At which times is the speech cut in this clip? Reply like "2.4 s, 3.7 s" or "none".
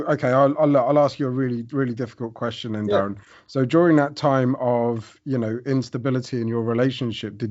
none